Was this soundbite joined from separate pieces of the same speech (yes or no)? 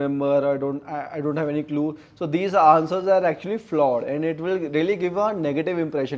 no